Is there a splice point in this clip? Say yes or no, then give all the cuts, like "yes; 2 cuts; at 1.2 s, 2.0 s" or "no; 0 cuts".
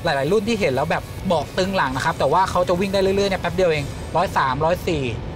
no; 0 cuts